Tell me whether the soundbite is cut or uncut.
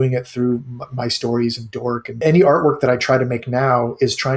cut